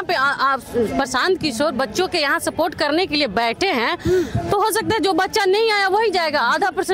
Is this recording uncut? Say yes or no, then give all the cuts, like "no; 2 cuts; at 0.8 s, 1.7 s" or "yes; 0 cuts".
yes; 0 cuts